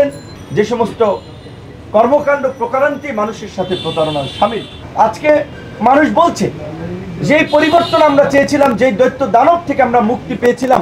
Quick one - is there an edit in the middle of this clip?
no; 0 cuts

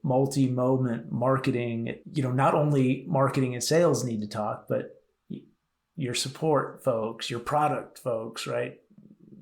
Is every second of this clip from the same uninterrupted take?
no; 1 cut; at 2.0 s

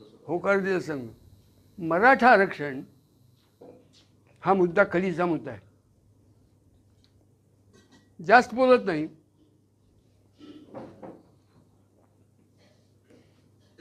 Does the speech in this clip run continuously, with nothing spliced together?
yes; 0 cuts

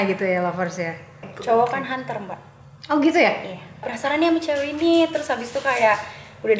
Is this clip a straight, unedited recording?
no; 2 cuts; at 1.3 s, 3.9 s

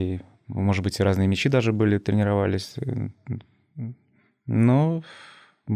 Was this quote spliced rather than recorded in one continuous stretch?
no; 0 cuts

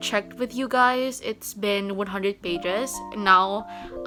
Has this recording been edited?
no; 0 cuts

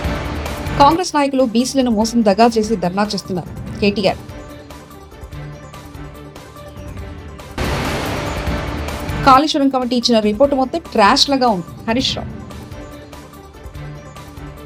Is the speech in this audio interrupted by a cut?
no; 0 cuts

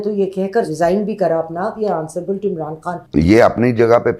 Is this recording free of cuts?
no; 2 cuts; at 1.8 s, 3.0 s

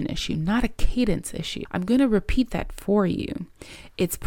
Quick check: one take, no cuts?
no; 1 cut; at 1.6 s

